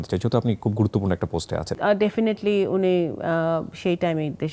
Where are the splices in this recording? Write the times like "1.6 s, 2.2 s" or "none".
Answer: 1.8 s